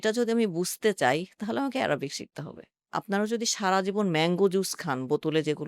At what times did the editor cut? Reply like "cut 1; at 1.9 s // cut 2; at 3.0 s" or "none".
cut 1; at 2.8 s